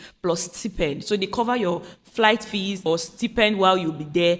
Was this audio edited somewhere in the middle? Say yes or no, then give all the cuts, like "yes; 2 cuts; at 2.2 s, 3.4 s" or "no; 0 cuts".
yes; 1 cut; at 2.9 s